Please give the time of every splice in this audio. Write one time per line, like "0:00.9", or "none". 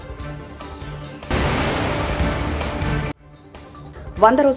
0:01.3